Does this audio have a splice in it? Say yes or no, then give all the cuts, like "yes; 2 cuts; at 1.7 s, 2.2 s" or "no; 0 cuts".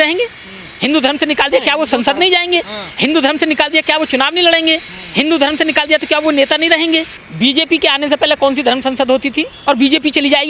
yes; 2 cuts; at 7.2 s, 9.5 s